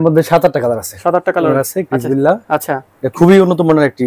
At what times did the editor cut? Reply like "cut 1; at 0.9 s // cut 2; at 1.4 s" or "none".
cut 1; at 1.6 s